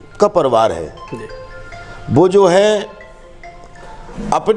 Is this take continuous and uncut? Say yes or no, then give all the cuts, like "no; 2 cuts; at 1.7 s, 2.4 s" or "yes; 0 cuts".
yes; 0 cuts